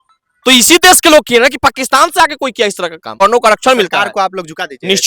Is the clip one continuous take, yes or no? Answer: no